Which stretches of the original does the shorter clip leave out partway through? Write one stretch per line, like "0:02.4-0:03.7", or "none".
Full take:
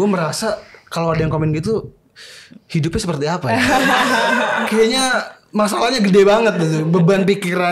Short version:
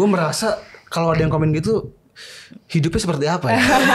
none